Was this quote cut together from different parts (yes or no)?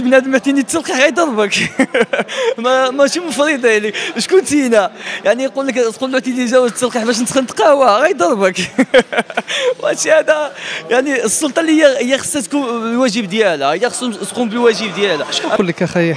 no